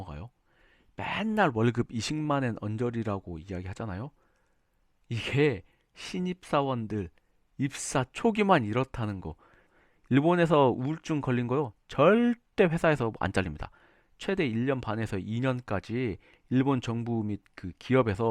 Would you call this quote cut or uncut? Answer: cut